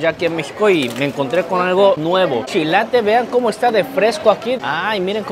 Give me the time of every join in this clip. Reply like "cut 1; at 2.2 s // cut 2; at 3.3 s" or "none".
cut 1; at 2.5 s // cut 2; at 4.6 s

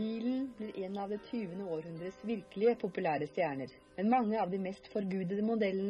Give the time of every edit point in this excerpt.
none

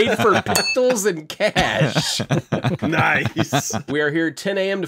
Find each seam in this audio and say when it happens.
cut 1; at 3.9 s

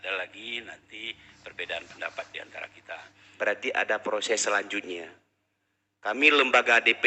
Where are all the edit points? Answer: cut 1; at 3.2 s

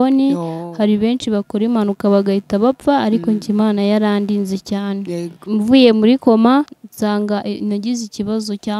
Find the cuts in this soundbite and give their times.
cut 1; at 5.4 s // cut 2; at 6.8 s

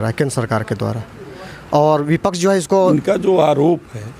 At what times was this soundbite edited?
cut 1; at 2.9 s

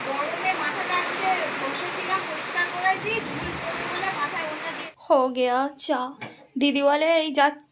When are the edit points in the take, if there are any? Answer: cut 1; at 4.8 s

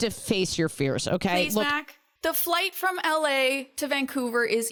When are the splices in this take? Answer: none

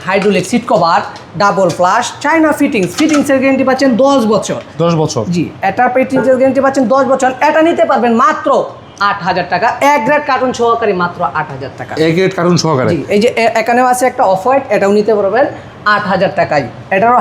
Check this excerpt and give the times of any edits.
none

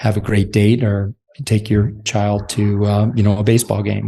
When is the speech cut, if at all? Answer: cut 1; at 2.0 s

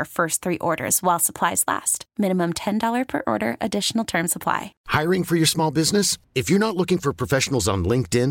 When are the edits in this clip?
cut 1; at 4.7 s

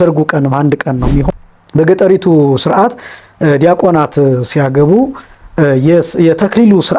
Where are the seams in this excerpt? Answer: cut 1; at 1.3 s

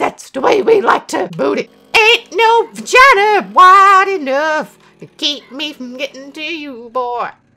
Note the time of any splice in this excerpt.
cut 1; at 1.8 s

